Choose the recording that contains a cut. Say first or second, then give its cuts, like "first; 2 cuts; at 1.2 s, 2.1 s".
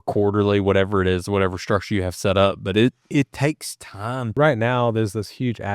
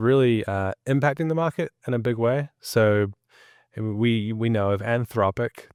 first; 1 cut; at 4.3 s